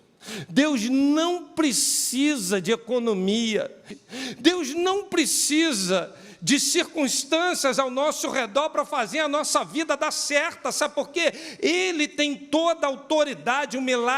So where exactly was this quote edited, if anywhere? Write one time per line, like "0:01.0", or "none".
0:03.8